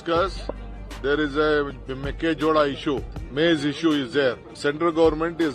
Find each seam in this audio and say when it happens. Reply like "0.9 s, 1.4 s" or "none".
3.2 s, 4.5 s